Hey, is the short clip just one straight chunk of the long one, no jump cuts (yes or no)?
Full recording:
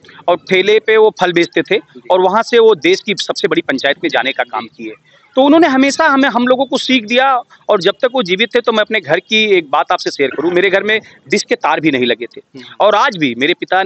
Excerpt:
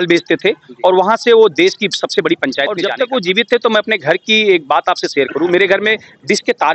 no